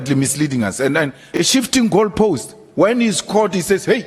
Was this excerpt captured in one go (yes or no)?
no